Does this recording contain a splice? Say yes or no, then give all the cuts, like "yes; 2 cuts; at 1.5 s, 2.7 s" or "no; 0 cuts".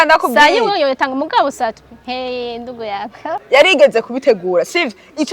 yes; 1 cut; at 3.3 s